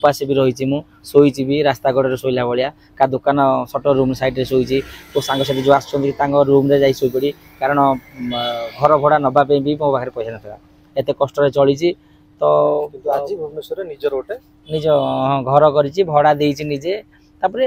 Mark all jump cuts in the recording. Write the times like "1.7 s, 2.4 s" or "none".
none